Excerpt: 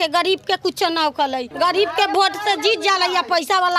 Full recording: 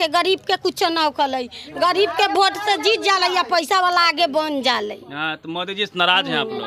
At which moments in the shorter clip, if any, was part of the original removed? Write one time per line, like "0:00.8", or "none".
0:01.5